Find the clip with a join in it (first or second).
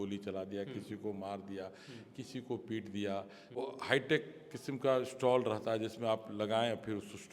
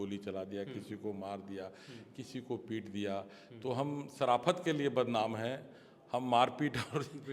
first